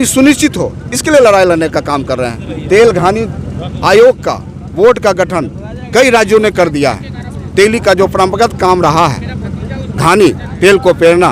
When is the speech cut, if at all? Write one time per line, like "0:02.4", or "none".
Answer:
none